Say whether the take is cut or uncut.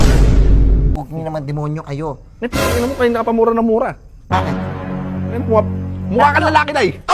cut